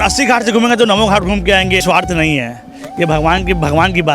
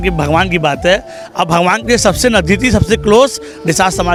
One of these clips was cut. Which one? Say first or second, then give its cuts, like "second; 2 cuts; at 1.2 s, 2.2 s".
first; 1 cut; at 1.8 s